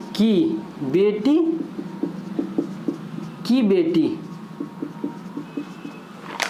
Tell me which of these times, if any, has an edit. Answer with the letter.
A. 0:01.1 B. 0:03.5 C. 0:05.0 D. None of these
D